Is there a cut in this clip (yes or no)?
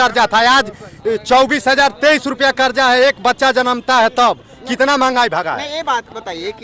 no